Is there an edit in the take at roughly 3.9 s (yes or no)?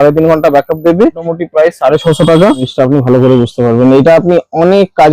no